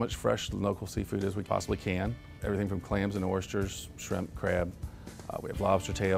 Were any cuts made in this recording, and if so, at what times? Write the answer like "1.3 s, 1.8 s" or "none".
1.4 s, 2.3 s